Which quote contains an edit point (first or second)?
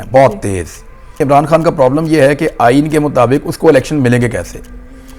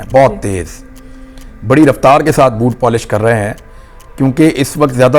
first